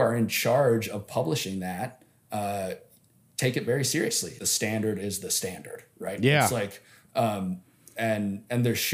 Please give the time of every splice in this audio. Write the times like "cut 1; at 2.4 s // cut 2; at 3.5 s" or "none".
cut 1; at 4.4 s